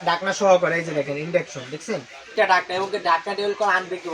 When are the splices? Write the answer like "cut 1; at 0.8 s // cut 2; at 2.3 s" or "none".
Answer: cut 1; at 2.3 s